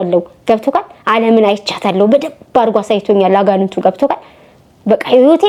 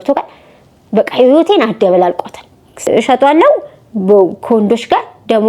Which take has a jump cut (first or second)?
second